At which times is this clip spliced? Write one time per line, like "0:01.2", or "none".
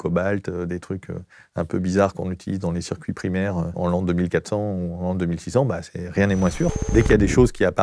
0:03.7
0:06.8